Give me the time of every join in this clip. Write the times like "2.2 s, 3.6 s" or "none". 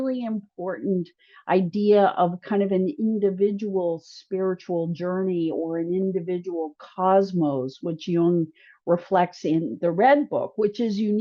none

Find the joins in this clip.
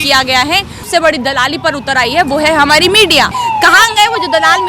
0.9 s, 3.3 s

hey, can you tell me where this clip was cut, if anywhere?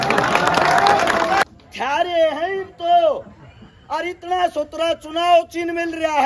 1.4 s

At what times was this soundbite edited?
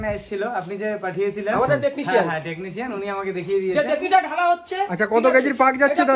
3.8 s

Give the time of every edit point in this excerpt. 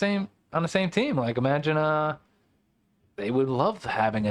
none

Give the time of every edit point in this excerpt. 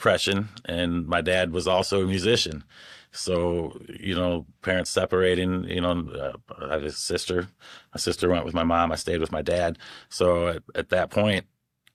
none

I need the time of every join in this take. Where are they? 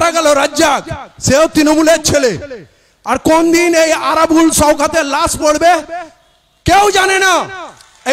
none

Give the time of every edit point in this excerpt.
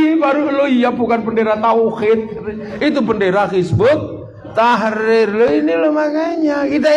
none

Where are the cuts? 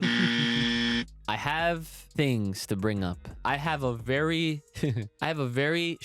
1.1 s, 2.0 s, 3.4 s, 5.1 s

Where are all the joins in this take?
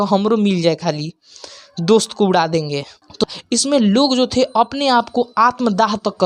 3.2 s

